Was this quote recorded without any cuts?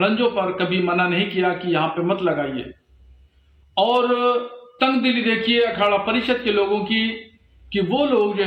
yes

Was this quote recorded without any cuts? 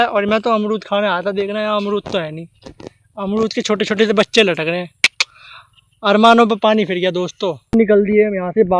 no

